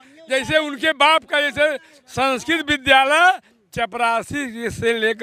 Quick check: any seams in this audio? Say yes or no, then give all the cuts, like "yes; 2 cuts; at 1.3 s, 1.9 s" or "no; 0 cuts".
no; 0 cuts